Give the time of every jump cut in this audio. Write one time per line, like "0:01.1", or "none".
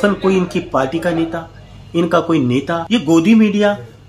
0:02.8